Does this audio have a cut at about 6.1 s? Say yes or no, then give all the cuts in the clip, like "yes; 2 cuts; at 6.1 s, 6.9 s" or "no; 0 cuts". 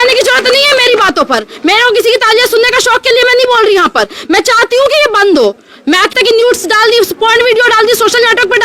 yes; 1 cut; at 6.1 s